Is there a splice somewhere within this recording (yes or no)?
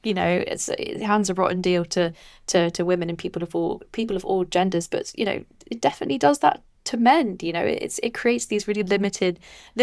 no